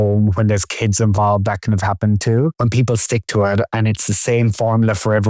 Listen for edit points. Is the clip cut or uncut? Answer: cut